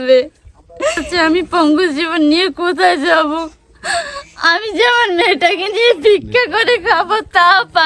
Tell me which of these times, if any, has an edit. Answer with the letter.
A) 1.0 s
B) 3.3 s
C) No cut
A